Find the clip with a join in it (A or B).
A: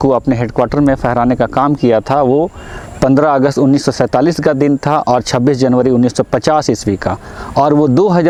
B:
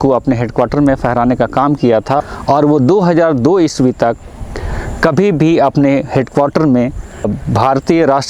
B